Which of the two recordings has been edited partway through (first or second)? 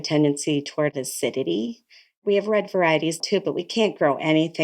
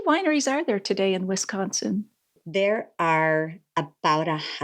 first